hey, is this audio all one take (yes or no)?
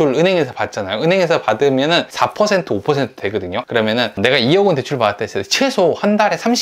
no